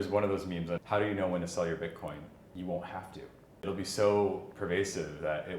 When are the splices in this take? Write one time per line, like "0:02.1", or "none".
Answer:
0:00.8
0:02.4
0:03.6